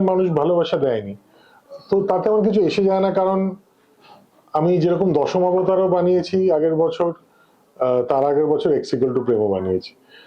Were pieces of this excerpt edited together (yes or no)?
no